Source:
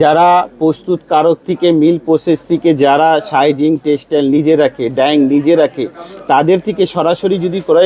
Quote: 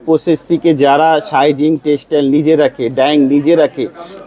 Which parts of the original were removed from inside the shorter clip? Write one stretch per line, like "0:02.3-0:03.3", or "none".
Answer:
none